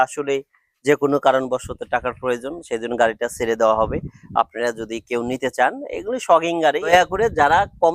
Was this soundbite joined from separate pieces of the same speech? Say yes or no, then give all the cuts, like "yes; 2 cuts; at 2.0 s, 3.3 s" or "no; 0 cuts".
yes; 1 cut; at 6.9 s